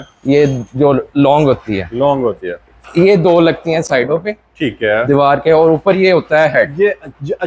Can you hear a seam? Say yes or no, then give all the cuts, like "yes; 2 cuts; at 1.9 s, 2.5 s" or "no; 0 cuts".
no; 0 cuts